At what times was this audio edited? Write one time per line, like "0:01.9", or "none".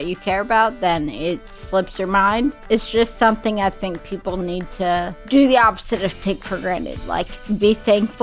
0:02.6
0:05.2